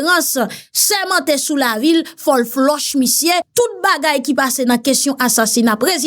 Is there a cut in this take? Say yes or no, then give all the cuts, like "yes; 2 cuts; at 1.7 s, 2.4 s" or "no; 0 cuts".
yes; 1 cut; at 3.5 s